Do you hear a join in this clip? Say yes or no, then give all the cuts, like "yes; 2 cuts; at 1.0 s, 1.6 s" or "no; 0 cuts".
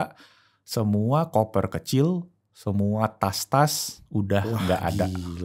no; 0 cuts